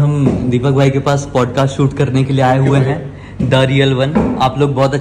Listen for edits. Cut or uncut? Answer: uncut